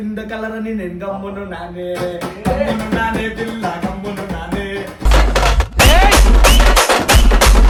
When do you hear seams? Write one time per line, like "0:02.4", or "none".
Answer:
none